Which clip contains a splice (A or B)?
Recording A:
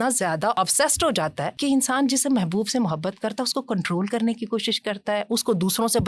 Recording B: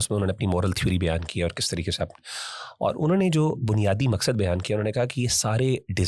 A